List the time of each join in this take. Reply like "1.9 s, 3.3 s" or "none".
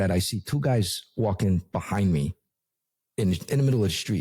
none